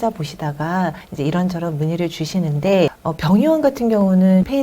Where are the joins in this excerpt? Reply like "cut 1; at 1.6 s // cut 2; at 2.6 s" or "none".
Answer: cut 1; at 1.0 s // cut 2; at 3.0 s

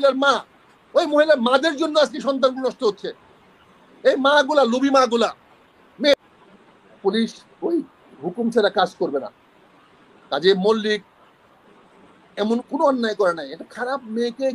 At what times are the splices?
cut 1; at 6.1 s

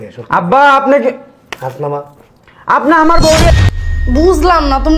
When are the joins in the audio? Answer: cut 1; at 3.5 s

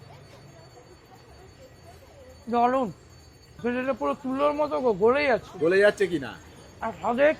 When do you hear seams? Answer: cut 1; at 3.5 s

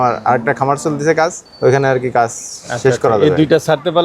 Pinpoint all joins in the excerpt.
cut 1; at 1.4 s

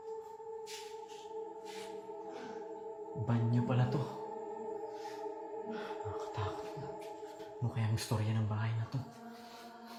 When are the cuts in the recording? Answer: none

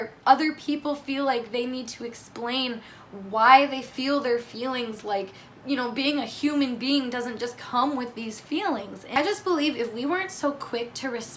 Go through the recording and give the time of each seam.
cut 1; at 9.1 s

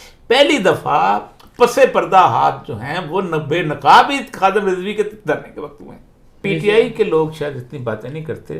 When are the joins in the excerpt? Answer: cut 1; at 6.4 s

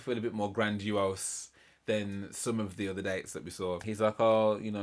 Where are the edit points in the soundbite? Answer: cut 1; at 3.8 s

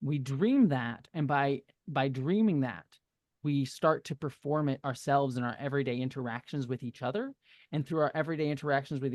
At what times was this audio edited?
none

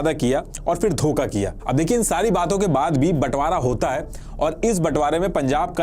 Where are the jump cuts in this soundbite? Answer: none

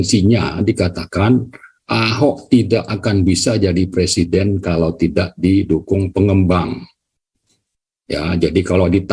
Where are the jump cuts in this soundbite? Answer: none

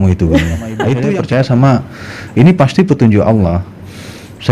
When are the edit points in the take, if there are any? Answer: cut 1; at 1.1 s

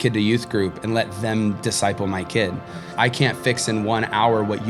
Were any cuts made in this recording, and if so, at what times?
cut 1; at 2.9 s

